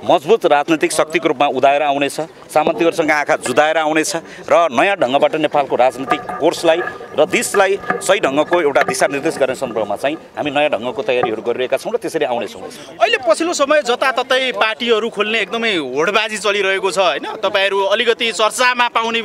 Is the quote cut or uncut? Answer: uncut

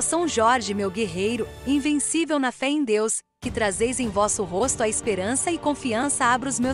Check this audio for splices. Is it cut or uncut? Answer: uncut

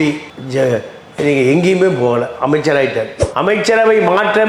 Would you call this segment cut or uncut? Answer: cut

